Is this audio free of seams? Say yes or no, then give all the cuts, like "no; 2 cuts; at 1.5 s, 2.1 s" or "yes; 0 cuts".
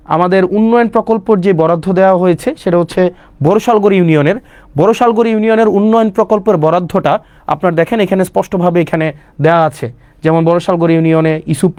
yes; 0 cuts